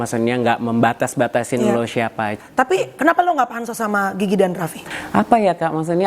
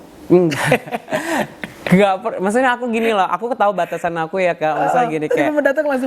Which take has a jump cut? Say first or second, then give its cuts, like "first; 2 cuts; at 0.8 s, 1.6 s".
first; 2 cuts; at 2.4 s, 4.9 s